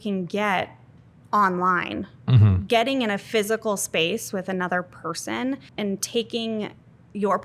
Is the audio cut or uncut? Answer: cut